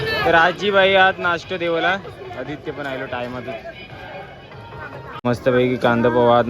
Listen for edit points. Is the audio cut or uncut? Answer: cut